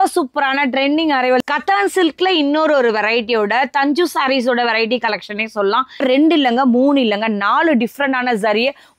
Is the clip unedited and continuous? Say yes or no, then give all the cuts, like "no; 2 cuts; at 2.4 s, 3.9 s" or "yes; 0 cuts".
no; 2 cuts; at 1.4 s, 6.0 s